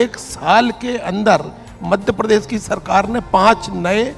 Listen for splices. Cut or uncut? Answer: uncut